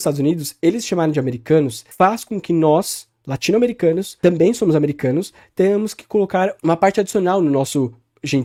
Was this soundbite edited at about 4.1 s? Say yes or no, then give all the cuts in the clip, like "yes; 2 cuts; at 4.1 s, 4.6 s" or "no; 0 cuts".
no; 0 cuts